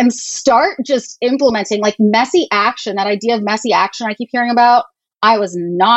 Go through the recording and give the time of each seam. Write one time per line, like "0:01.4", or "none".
none